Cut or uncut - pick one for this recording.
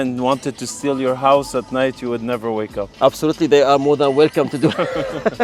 uncut